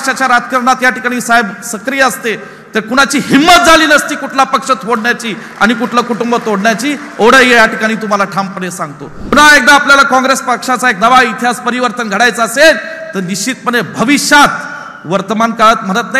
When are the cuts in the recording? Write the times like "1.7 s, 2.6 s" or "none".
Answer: 9.3 s